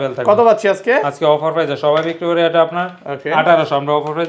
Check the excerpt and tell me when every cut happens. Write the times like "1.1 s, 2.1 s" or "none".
none